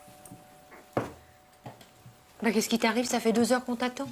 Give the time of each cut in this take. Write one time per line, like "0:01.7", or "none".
0:03.1